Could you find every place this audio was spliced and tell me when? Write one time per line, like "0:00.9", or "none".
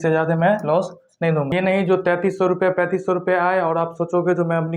0:01.5